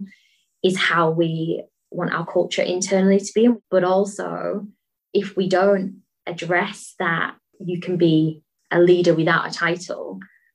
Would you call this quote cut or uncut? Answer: cut